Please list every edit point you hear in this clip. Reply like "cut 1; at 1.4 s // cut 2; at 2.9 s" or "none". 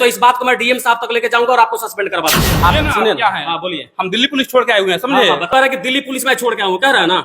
cut 1; at 2.5 s // cut 2; at 5.5 s